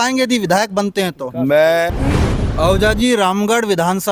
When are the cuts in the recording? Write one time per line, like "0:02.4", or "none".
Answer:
0:01.9

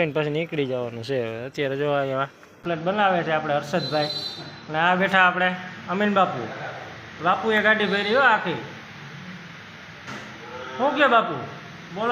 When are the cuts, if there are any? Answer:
0:02.6

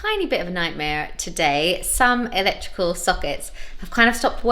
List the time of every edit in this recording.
none

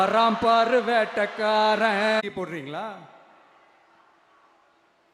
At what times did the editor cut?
0:02.2

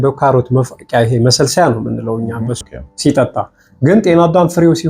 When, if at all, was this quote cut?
0:02.6

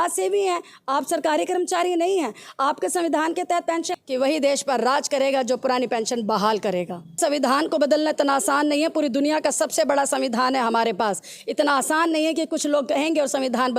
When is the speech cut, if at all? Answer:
0:03.9
0:07.2

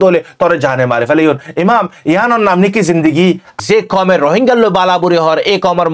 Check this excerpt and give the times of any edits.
0:03.5

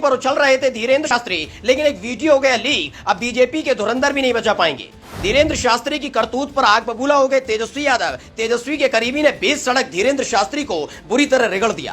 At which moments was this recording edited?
0:01.1

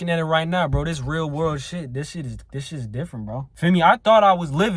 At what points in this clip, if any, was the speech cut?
0:03.5

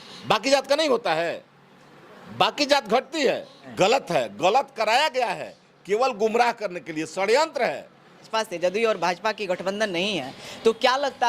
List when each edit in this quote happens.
0:03.6
0:08.3

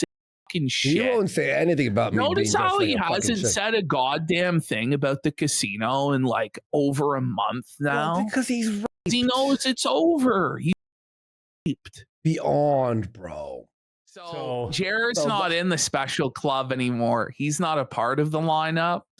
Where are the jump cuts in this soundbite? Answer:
0:14.3

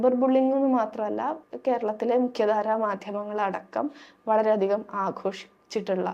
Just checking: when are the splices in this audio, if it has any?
0:01.4

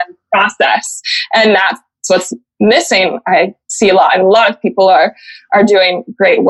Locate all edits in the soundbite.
none

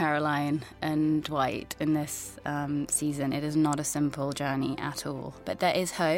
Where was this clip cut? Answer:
0:05.3

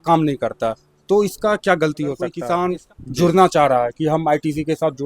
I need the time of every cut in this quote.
0:02.4

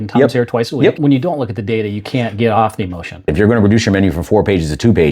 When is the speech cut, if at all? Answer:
0:01.0
0:03.3

